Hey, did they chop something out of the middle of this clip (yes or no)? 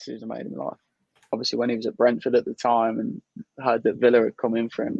yes